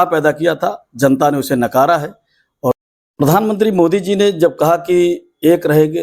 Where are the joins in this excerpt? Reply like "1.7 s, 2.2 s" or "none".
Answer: 2.7 s